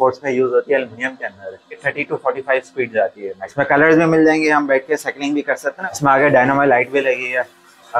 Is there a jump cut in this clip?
yes; 3 cuts; at 1.9 s, 3.4 s, 5.7 s

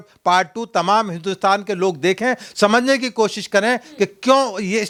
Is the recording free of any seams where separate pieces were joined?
yes; 0 cuts

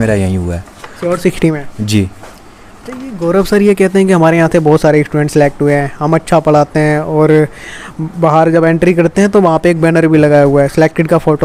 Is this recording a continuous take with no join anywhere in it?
yes; 0 cuts

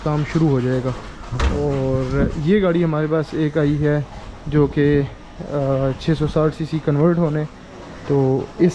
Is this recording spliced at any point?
no; 0 cuts

